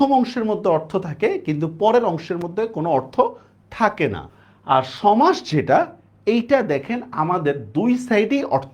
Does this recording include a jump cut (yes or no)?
yes